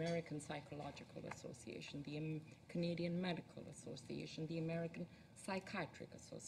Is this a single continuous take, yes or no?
yes